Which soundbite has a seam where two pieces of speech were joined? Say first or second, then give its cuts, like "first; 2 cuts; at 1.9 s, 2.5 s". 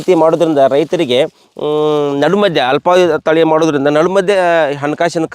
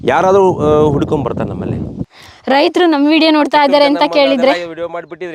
second; 1 cut; at 2.0 s